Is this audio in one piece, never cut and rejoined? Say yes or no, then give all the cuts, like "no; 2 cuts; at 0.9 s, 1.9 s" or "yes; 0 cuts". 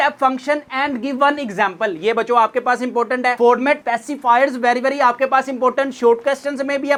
yes; 0 cuts